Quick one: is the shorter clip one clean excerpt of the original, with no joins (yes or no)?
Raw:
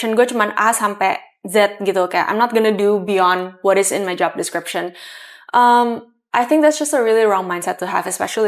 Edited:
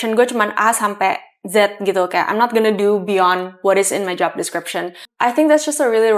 no